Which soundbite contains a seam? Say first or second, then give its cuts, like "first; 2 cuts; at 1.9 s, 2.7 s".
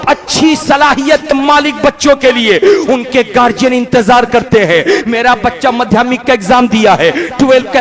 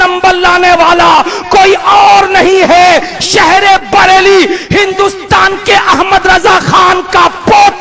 first; 1 cut; at 1.3 s